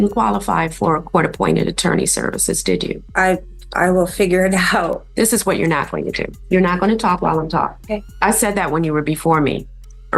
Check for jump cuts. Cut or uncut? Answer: cut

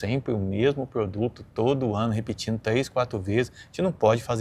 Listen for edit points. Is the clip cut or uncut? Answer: uncut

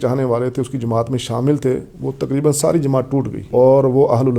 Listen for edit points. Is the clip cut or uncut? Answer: cut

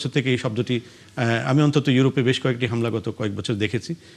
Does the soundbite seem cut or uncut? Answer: uncut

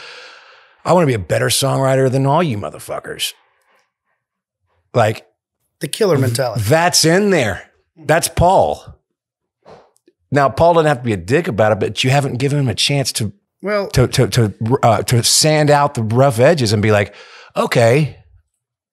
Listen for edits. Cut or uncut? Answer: uncut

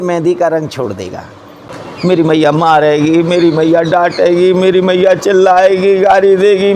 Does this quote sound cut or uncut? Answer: cut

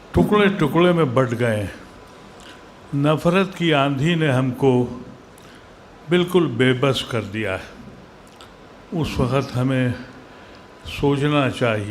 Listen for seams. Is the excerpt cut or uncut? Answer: uncut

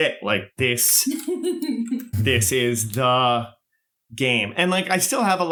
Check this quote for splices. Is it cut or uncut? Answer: uncut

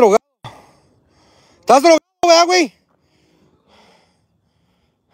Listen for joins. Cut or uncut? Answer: uncut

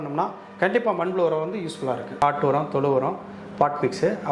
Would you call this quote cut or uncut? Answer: cut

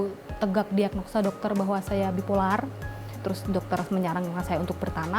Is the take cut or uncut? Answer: cut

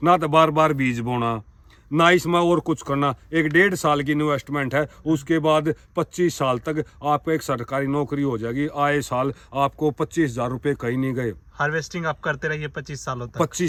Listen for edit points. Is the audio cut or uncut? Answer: uncut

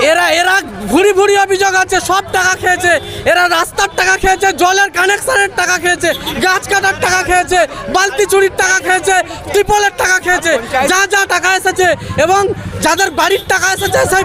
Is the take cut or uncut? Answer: uncut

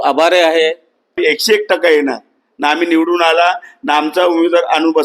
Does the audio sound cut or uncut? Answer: cut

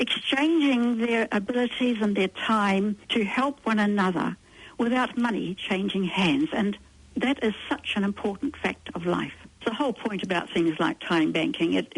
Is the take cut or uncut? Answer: cut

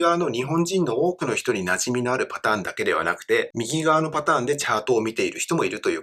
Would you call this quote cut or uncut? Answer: uncut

